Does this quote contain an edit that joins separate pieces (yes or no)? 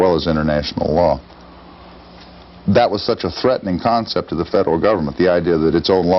no